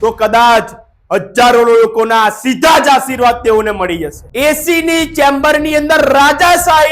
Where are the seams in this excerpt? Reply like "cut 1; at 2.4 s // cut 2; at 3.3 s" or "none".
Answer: cut 1; at 4.2 s